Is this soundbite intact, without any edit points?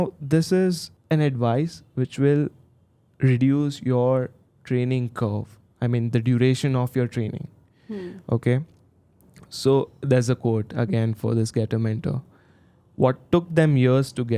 no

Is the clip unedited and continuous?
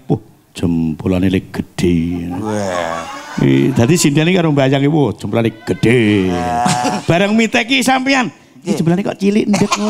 yes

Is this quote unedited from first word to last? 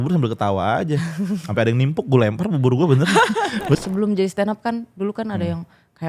no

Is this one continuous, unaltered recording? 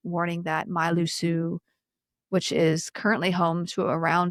yes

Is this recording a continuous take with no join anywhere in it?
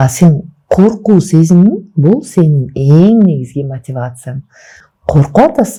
yes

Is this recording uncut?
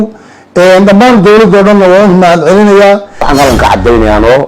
no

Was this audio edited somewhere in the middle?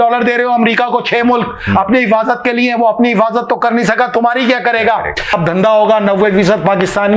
no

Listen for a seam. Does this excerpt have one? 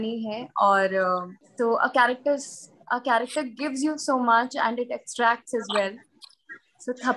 yes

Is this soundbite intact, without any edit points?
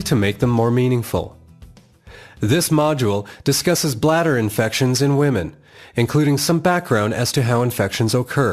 no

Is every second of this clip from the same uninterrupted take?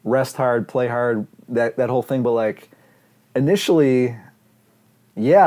yes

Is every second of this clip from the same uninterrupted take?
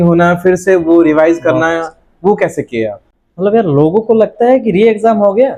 yes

